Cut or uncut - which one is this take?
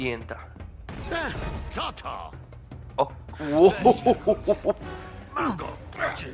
uncut